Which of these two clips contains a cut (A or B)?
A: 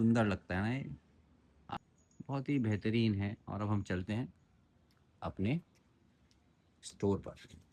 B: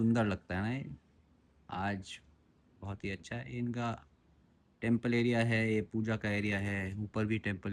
A